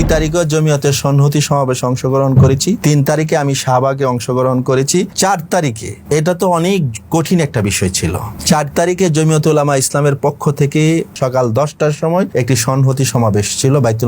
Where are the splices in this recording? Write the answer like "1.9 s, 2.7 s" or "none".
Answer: 2.8 s, 5.1 s, 5.9 s, 8.3 s, 11.1 s, 12.3 s